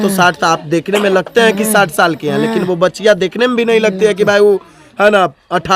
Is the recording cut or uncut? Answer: uncut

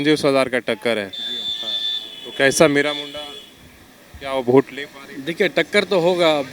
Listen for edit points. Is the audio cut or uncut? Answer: uncut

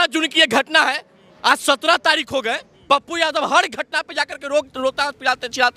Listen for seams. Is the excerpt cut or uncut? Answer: cut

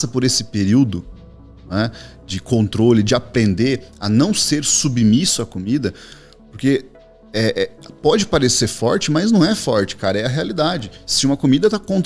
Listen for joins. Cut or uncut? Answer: uncut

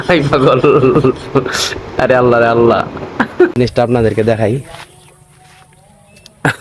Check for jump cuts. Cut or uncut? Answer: cut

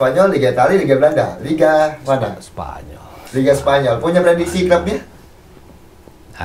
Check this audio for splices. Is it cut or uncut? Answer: uncut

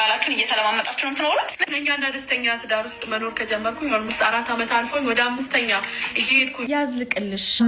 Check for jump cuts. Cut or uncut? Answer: uncut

